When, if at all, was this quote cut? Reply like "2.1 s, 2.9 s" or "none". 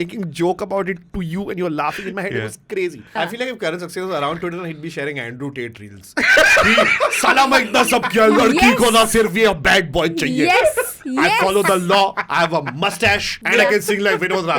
3.1 s, 13.3 s